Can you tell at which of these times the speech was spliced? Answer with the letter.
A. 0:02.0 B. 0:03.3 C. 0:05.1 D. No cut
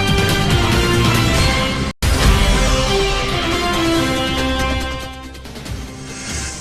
A